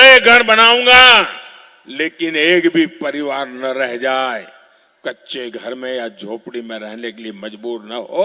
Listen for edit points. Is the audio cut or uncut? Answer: uncut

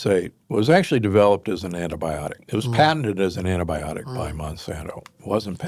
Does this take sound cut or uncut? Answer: uncut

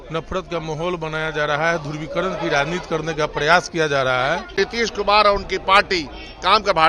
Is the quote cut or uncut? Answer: cut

